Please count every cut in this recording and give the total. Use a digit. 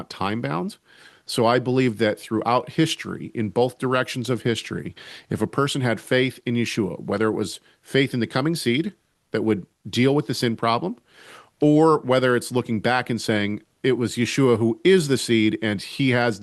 0